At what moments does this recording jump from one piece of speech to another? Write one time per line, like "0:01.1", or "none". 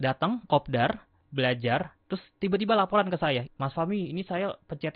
0:01.2
0:03.5